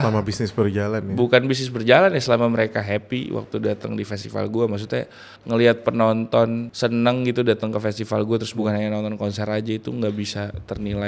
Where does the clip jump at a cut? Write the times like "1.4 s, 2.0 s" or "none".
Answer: 5.3 s, 6.7 s, 8.6 s